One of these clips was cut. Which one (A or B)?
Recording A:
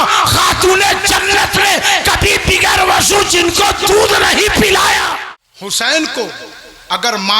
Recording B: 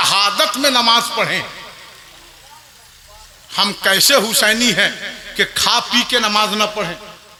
A